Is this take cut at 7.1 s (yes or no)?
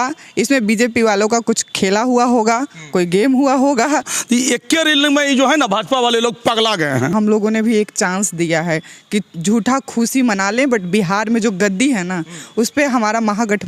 yes